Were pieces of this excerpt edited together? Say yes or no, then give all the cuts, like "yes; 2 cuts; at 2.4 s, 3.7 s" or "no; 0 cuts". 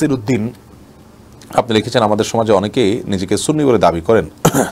no; 0 cuts